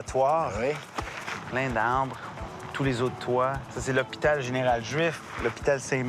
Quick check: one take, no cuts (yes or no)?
no